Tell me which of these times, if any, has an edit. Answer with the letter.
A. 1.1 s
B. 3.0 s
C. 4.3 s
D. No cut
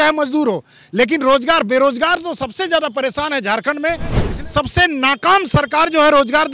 C